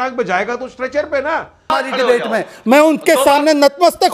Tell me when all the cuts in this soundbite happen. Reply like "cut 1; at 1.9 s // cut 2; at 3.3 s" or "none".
cut 1; at 1.7 s